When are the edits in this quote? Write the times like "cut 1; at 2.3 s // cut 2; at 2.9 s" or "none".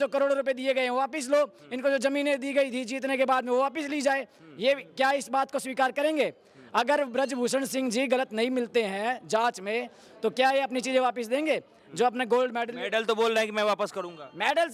none